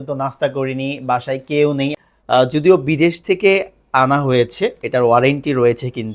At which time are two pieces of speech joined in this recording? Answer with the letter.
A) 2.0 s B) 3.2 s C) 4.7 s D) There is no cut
A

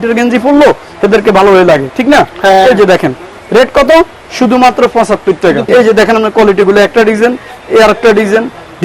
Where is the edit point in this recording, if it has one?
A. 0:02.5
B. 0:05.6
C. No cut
B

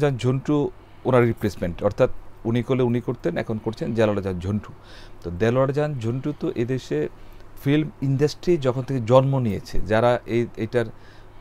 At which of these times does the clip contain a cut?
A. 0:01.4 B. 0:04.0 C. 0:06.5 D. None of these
D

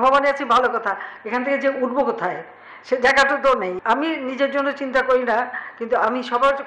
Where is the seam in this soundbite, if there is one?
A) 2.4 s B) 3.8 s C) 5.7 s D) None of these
B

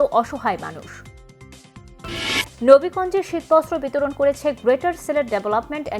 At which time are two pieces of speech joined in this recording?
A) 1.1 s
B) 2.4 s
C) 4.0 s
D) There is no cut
B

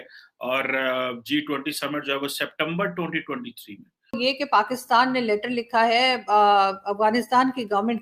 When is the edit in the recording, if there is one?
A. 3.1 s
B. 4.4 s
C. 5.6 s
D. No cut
B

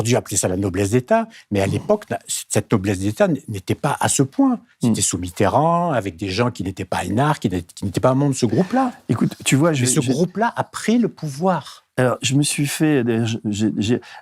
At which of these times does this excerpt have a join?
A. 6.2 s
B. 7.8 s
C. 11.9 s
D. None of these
D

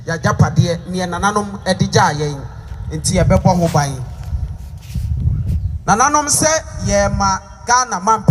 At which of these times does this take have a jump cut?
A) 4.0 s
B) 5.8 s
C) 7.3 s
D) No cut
D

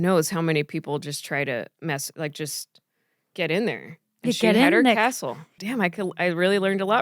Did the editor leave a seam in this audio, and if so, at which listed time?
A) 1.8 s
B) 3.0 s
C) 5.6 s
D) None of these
C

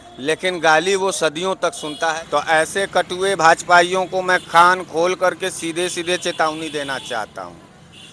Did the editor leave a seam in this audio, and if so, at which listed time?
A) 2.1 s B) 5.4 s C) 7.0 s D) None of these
A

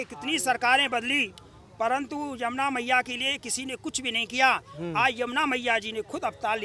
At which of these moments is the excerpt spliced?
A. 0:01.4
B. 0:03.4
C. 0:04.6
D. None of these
D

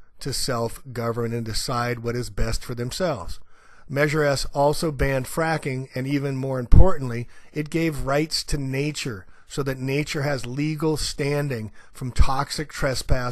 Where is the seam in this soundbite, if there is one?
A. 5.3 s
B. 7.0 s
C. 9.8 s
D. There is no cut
C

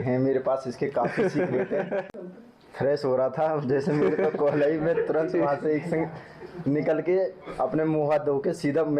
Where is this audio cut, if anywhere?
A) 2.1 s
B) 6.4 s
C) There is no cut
A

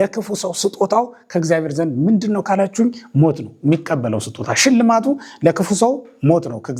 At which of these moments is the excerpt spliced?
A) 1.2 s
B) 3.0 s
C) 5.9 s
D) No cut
D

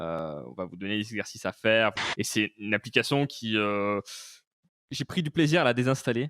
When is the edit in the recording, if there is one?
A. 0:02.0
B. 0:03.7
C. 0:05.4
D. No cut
A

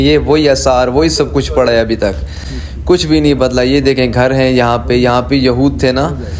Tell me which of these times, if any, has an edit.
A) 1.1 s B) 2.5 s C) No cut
C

